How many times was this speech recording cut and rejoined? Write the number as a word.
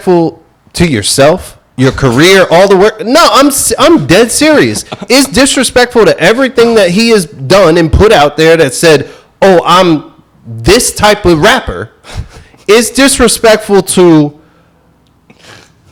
zero